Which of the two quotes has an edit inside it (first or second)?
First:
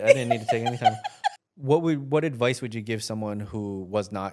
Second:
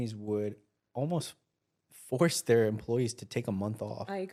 first